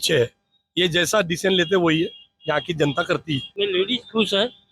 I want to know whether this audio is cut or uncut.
cut